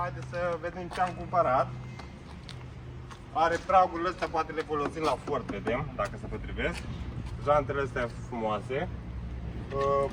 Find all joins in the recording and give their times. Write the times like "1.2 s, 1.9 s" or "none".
none

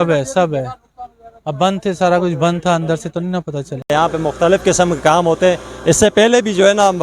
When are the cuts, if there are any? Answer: 3.9 s

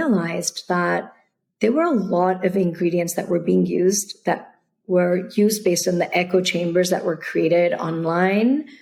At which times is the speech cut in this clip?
none

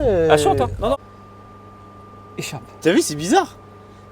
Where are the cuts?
0.9 s

